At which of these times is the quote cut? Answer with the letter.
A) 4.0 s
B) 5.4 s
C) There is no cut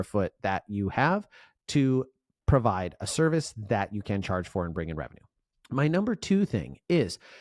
C